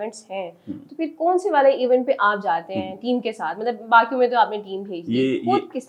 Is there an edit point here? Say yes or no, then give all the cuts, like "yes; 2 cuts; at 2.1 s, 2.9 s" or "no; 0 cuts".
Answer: no; 0 cuts